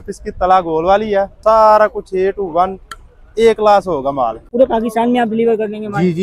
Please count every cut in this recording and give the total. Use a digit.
2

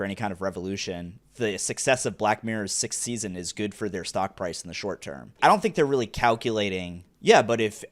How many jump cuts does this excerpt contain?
2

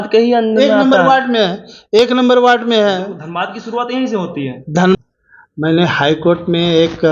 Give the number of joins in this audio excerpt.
1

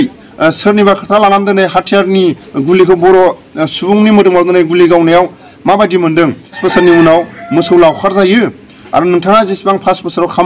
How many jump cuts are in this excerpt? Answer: 1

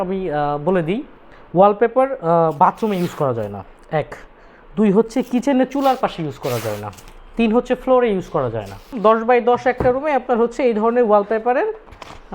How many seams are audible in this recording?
1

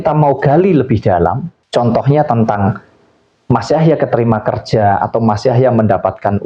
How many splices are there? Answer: 1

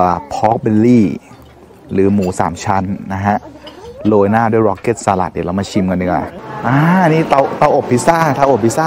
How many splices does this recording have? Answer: 1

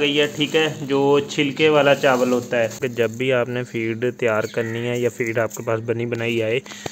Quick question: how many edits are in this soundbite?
1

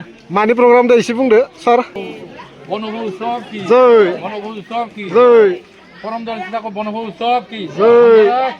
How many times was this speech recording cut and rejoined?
1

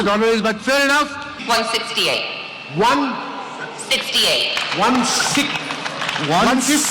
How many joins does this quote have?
1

